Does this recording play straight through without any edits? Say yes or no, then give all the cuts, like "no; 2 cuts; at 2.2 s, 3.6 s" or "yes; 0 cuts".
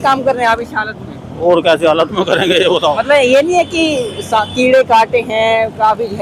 yes; 0 cuts